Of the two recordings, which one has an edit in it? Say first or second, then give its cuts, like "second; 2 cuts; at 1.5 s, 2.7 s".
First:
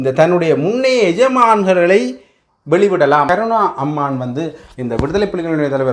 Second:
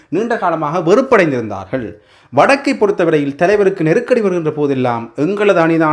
first; 1 cut; at 3.3 s